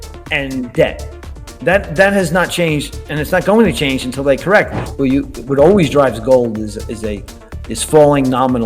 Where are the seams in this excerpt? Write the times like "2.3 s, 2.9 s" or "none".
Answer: 4.8 s

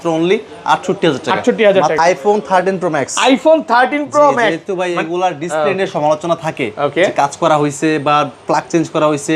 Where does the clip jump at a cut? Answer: 1.9 s

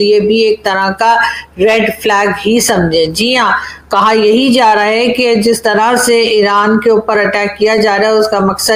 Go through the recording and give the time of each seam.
none

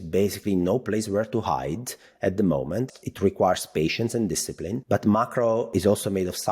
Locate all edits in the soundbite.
4.7 s, 5.7 s

